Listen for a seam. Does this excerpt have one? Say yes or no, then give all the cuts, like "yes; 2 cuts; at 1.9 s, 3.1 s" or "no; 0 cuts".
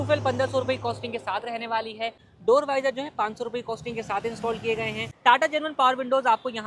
yes; 2 cuts; at 2.3 s, 5.1 s